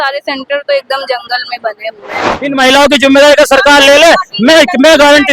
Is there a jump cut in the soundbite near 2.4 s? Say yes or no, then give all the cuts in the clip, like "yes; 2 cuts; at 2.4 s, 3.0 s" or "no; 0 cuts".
yes; 1 cut; at 2.4 s